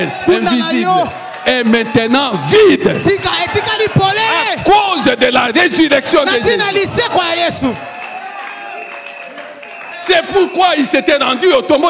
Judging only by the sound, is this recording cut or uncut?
cut